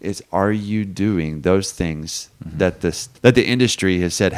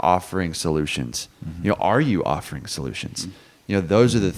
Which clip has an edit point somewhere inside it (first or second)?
first